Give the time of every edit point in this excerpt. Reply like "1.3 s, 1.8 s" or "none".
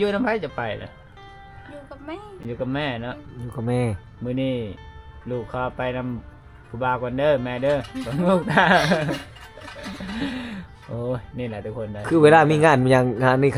none